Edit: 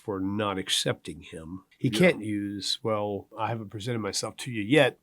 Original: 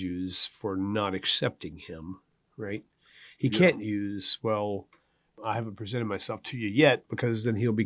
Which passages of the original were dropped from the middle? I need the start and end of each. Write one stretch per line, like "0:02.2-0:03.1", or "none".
0:02.2-0:03.2
0:04.9-0:05.4